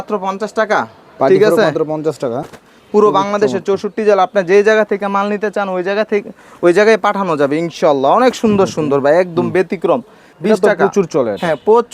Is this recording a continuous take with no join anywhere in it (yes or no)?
no